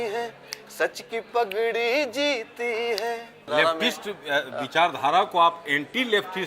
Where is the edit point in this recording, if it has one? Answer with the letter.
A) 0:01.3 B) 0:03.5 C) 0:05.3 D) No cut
B